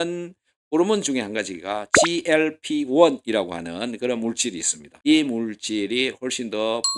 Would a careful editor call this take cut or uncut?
uncut